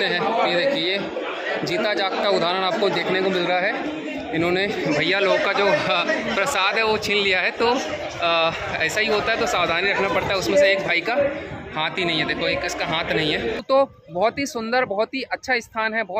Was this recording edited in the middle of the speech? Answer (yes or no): yes